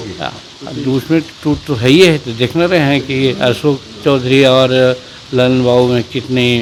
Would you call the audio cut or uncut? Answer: uncut